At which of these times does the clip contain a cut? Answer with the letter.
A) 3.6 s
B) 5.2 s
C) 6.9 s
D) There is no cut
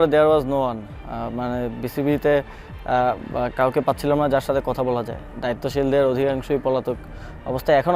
D